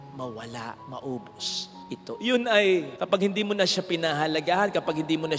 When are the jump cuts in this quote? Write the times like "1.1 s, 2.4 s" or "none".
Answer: none